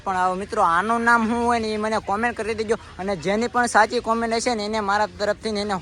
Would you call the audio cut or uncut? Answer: uncut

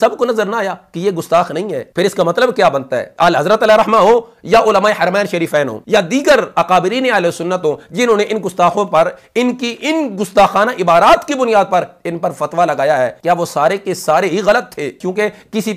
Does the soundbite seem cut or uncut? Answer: uncut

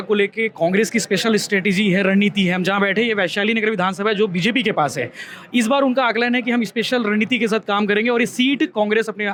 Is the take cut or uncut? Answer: uncut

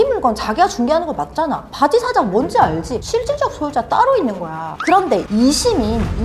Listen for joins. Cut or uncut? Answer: cut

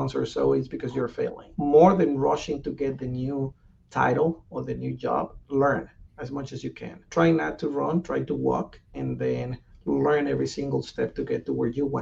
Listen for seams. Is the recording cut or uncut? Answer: uncut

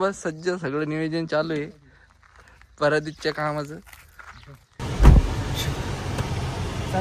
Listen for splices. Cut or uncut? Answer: cut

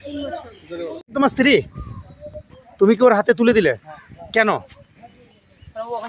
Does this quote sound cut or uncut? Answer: cut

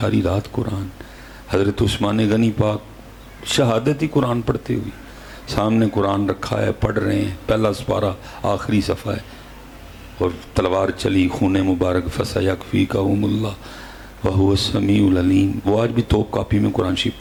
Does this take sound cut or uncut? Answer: uncut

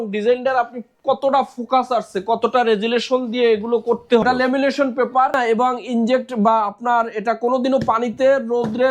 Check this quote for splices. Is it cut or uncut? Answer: cut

